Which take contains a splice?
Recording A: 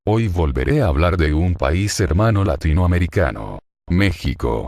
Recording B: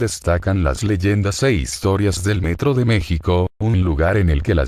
B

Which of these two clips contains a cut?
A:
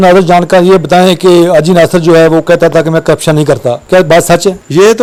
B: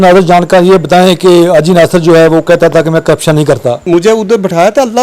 B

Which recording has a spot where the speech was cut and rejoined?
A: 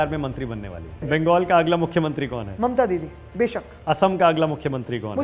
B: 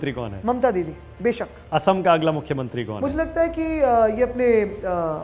A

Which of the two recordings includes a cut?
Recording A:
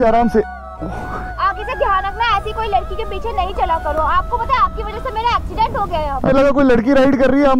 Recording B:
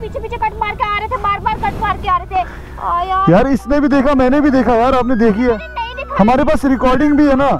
A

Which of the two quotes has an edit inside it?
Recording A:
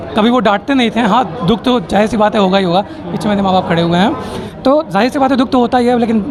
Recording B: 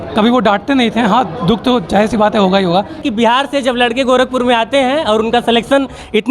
B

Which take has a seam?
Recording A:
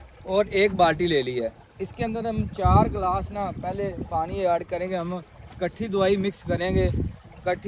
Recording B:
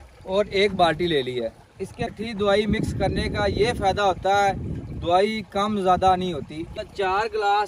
B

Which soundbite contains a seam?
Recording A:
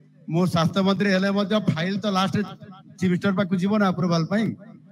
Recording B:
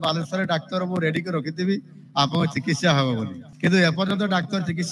B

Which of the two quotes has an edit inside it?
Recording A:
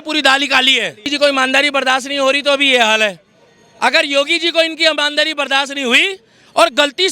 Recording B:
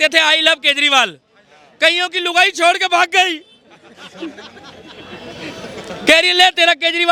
A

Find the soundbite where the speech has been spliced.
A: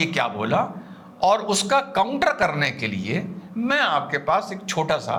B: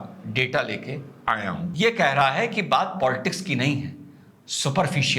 B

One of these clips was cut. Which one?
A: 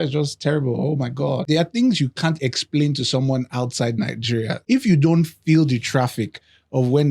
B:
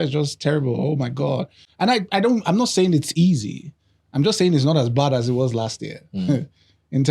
A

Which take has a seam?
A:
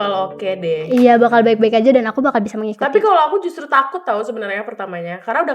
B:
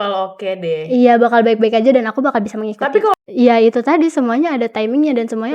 B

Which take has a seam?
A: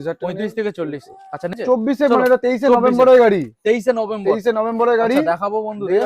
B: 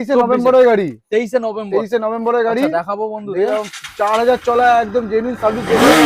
A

